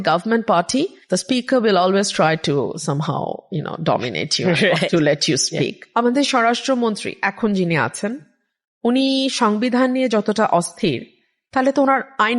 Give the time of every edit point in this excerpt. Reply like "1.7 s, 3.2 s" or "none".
1.0 s, 5.8 s